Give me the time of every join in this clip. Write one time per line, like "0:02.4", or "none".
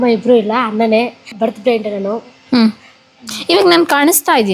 0:01.2